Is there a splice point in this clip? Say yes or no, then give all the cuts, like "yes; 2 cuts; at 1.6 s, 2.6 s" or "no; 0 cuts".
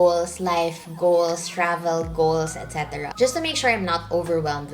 yes; 1 cut; at 3.1 s